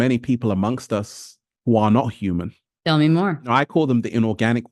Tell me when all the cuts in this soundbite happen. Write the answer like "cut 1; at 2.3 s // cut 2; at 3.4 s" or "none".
cut 1; at 3.5 s